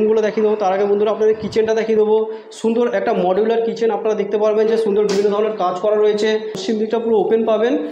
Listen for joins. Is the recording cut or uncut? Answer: cut